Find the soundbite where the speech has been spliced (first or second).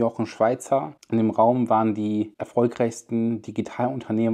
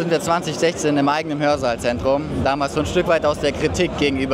first